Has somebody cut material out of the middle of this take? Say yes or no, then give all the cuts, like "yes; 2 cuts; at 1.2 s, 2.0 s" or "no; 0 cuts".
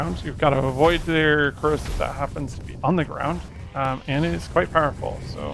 yes; 1 cut; at 3.6 s